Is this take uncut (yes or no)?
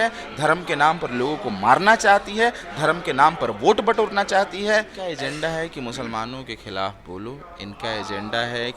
no